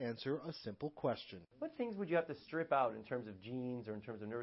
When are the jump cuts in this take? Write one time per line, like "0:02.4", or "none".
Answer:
0:03.4